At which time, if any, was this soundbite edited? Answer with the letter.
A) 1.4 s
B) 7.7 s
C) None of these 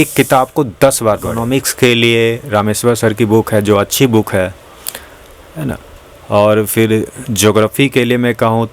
A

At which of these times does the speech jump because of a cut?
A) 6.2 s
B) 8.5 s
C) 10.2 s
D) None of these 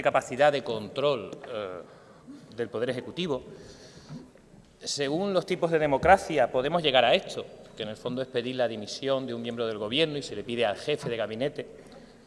A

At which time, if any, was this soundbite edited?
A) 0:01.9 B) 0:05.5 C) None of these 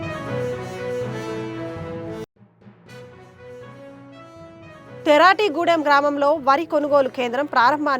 A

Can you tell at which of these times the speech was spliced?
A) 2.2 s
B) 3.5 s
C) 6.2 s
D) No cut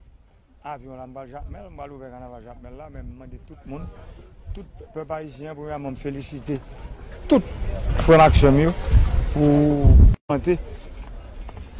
A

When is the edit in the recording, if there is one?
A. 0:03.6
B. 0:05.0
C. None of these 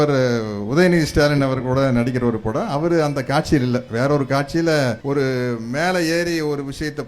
B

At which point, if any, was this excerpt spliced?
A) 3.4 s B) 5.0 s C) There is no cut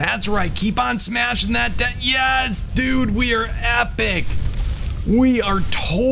C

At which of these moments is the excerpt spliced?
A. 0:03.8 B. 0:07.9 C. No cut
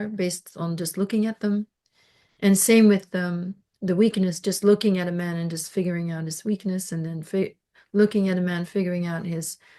C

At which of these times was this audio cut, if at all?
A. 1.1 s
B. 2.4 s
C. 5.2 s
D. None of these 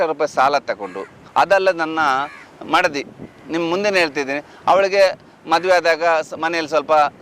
A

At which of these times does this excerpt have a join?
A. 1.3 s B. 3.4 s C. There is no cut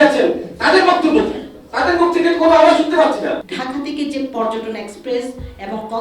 B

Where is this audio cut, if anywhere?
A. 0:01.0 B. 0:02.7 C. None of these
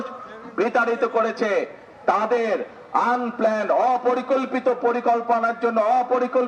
C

